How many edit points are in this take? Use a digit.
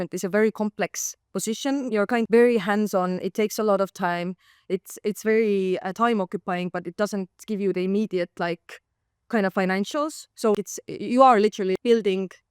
3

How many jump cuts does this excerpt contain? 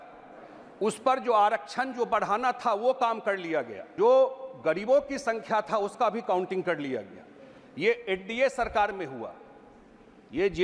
1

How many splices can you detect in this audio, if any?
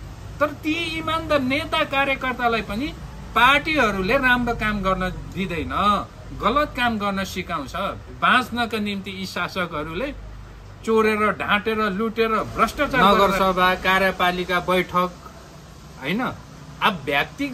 1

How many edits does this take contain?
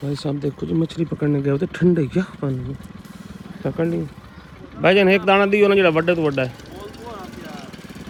0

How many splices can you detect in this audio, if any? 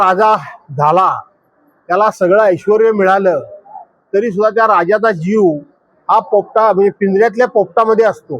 0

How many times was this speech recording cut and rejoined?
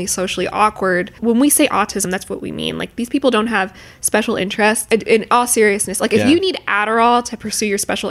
2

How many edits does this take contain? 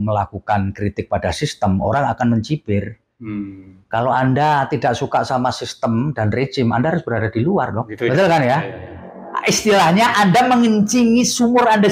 0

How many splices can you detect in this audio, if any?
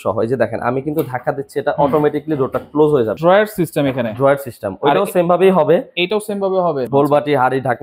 2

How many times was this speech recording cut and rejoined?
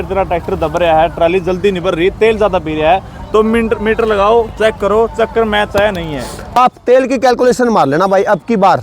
1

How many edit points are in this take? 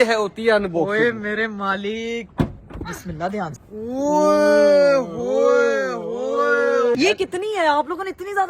2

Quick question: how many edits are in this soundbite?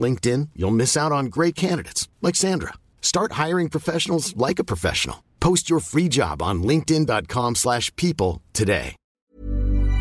1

